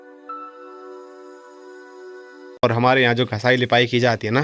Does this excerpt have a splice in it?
yes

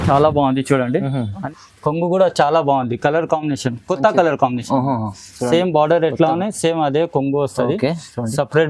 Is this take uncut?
no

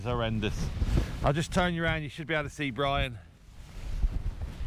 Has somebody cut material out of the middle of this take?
no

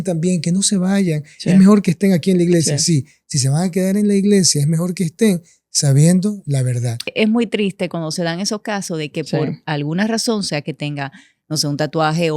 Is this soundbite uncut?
no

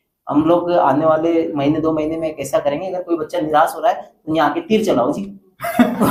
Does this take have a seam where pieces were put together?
no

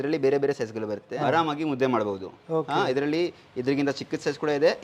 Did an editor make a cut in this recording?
yes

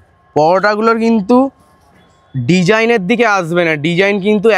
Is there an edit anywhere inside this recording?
no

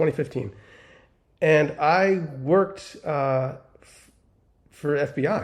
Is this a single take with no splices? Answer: yes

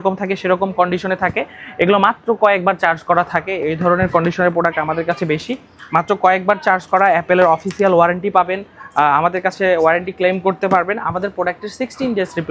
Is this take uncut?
yes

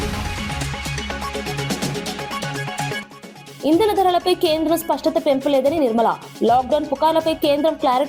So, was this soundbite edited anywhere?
yes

